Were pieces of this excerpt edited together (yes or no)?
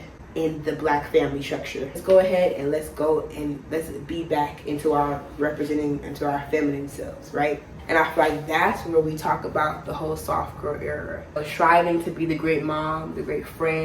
yes